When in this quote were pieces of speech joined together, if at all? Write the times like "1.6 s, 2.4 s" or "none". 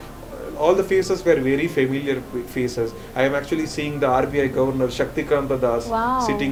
none

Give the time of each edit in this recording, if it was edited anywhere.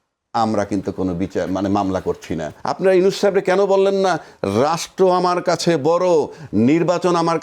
2.6 s

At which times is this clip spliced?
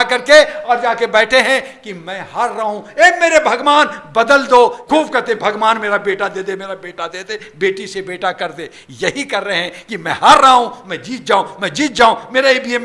4.8 s

